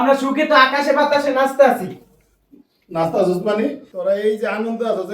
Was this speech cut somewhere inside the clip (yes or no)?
no